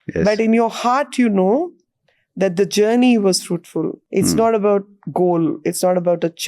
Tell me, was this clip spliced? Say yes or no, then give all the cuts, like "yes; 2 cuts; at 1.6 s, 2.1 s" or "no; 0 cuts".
yes; 1 cut; at 4.0 s